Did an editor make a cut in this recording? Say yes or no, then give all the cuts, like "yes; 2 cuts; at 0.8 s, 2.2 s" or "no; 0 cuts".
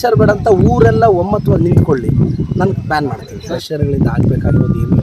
yes; 1 cut; at 3.3 s